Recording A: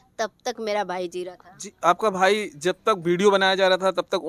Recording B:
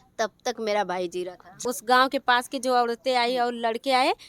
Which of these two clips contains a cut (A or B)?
B